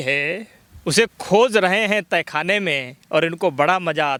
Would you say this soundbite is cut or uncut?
uncut